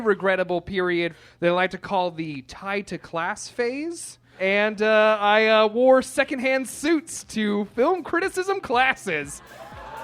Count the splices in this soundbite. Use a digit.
2